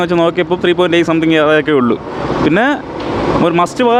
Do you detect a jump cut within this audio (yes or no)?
no